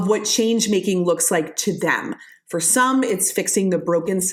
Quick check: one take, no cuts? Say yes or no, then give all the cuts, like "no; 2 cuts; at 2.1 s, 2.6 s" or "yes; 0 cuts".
yes; 0 cuts